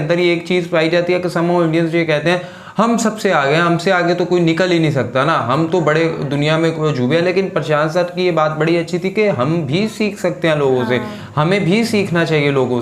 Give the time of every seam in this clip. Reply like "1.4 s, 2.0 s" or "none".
none